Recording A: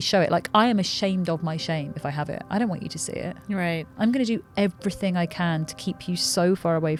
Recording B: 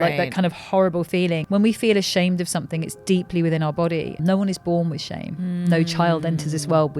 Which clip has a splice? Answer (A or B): B